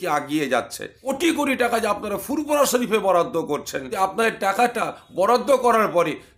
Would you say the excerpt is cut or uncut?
cut